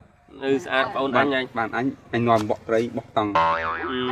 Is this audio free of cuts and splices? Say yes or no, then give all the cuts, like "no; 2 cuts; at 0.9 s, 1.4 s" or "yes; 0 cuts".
yes; 0 cuts